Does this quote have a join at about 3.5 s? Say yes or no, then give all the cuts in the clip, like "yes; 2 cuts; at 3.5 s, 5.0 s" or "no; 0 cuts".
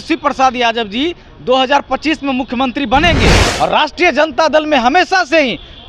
yes; 1 cut; at 3.5 s